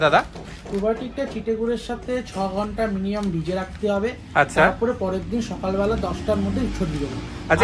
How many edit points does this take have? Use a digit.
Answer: 0